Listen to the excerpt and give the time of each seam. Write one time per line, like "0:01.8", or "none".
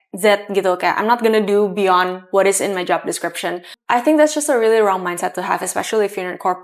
0:03.7